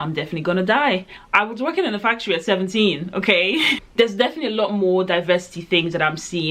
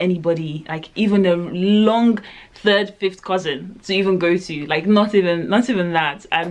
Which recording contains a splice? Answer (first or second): first